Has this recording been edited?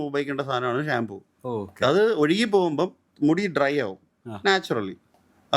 no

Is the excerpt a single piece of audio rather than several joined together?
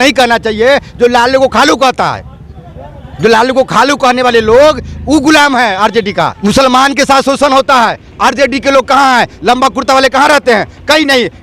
no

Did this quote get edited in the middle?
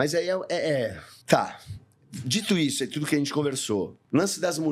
no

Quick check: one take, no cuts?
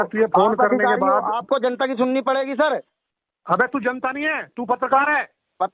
yes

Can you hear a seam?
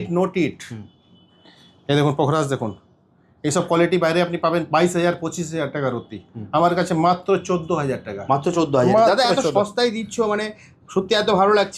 no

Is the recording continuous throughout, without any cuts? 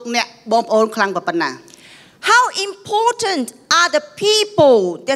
yes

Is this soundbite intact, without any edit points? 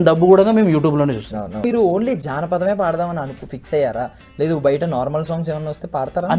no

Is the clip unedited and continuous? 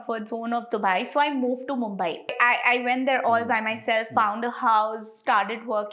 no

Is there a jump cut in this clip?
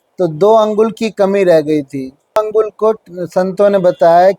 yes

